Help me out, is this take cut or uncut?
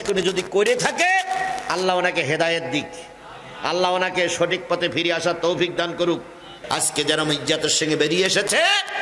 cut